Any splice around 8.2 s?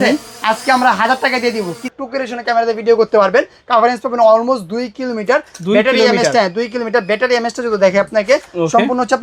no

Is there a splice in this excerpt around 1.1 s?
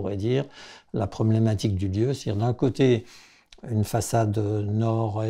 no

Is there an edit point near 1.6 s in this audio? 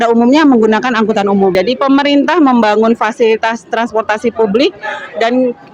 yes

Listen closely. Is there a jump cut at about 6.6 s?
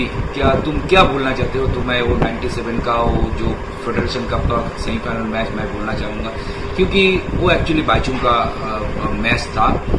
no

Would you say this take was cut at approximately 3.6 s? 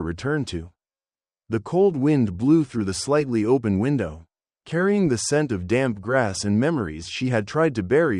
no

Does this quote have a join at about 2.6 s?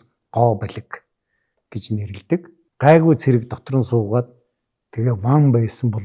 yes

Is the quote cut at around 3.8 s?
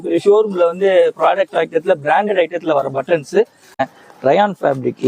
yes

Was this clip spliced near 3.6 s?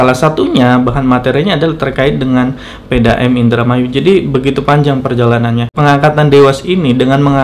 no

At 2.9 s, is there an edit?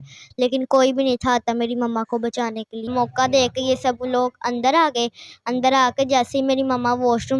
yes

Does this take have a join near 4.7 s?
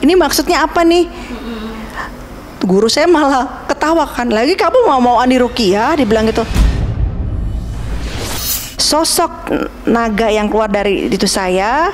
no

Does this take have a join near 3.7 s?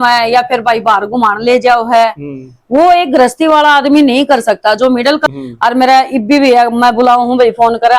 no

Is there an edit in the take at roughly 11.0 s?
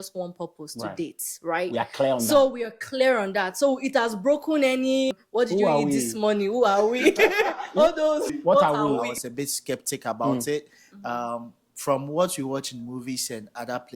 no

